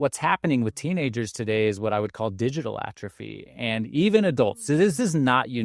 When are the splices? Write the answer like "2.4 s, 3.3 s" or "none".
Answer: none